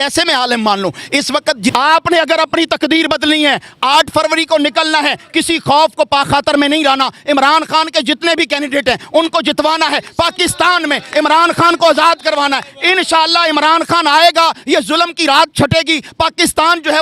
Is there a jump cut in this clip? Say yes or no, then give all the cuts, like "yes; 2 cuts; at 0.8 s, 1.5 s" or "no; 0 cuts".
yes; 1 cut; at 1.7 s